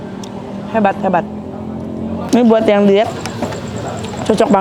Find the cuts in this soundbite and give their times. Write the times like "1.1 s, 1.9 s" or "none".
2.3 s